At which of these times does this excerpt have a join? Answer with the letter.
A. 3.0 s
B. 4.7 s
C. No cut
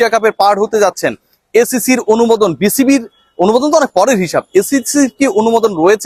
C